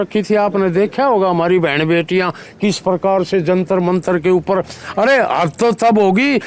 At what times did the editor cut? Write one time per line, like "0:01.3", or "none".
none